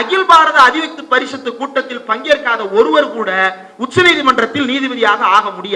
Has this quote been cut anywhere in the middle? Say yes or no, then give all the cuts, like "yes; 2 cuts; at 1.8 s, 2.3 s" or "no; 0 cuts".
no; 0 cuts